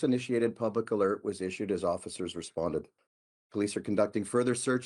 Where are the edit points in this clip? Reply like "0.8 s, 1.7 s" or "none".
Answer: 3.0 s